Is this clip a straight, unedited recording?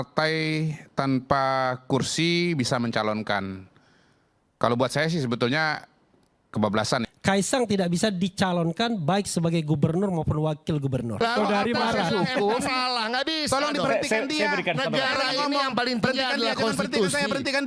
no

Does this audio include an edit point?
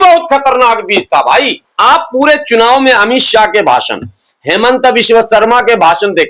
yes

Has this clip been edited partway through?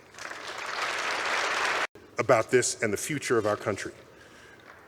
yes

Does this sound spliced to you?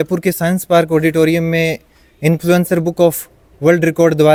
no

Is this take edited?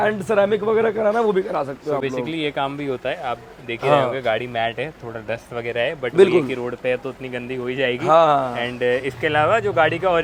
no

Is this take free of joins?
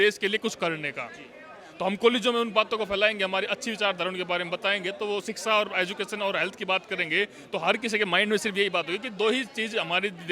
yes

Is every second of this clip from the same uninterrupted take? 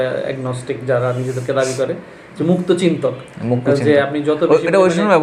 yes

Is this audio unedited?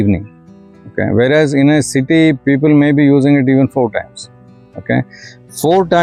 yes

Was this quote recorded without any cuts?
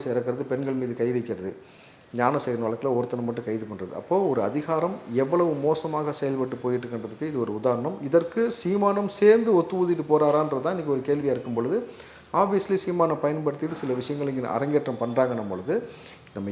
yes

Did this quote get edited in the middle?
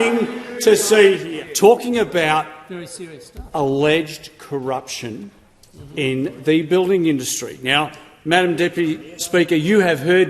yes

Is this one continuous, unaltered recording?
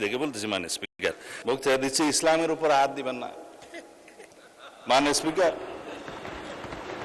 no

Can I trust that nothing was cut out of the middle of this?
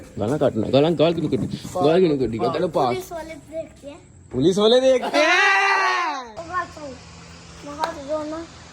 no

